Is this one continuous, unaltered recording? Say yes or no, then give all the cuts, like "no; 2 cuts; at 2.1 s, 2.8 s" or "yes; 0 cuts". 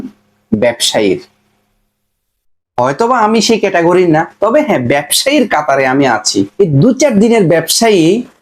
no; 1 cut; at 6.5 s